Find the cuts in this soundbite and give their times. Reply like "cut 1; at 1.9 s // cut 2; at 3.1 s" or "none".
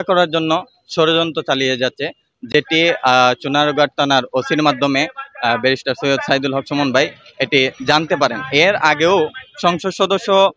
none